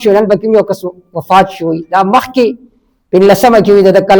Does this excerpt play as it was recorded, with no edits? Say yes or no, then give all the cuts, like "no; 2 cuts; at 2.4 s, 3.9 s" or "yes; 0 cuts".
yes; 0 cuts